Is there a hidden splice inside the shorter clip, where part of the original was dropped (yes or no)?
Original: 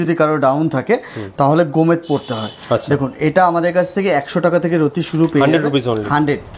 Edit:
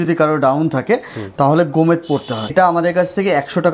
yes